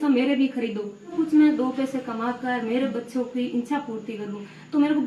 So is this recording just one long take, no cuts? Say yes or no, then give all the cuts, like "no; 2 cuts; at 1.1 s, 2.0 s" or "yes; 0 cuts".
no; 1 cut; at 1.1 s